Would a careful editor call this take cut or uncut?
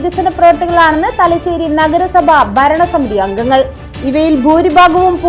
uncut